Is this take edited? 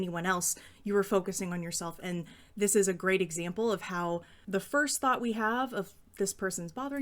yes; 1 cut; at 4.3 s

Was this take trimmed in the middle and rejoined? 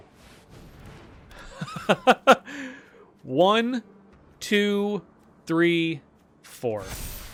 no; 0 cuts

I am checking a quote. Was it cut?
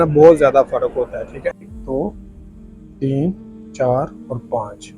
yes; 1 cut; at 1.7 s

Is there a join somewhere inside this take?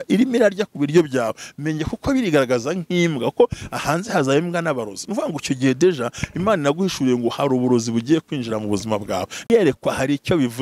yes; 1 cut; at 9.5 s

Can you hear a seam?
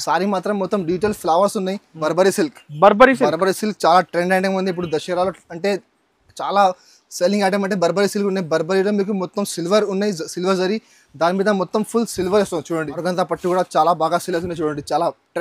yes; 2 cuts; at 2.0 s, 12.9 s

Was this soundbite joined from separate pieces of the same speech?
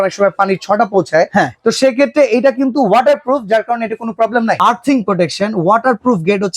yes; 1 cut; at 4.6 s

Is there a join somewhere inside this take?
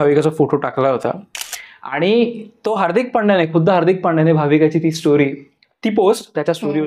no; 0 cuts

